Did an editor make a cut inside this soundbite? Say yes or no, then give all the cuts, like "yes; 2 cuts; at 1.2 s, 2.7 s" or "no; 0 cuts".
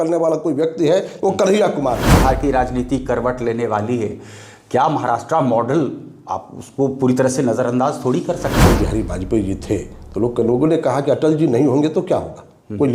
yes; 2 cuts; at 2.1 s, 8.6 s